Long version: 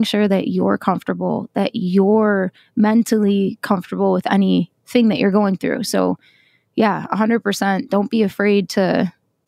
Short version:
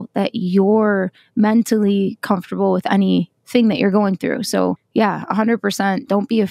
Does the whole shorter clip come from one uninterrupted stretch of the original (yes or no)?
no